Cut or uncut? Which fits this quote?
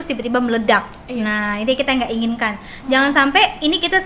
uncut